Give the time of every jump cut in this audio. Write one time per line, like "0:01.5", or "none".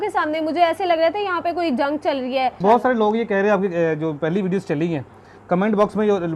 0:02.6